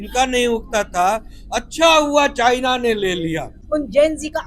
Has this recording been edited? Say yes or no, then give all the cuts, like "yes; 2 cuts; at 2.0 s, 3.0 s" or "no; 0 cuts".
yes; 1 cut; at 3.5 s